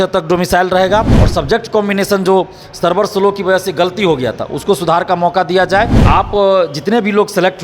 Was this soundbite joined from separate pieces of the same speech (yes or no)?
yes